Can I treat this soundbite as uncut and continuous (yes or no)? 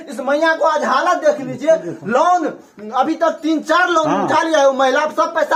yes